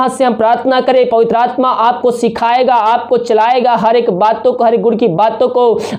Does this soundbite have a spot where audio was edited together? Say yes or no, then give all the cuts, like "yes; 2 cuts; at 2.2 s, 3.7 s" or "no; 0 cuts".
no; 0 cuts